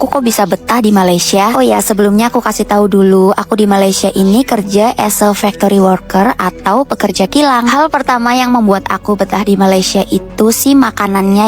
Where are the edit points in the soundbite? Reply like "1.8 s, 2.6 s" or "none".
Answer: none